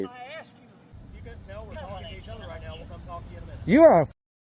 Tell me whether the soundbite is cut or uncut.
cut